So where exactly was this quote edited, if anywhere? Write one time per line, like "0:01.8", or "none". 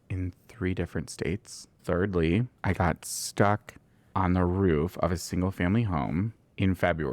0:01.7
0:02.5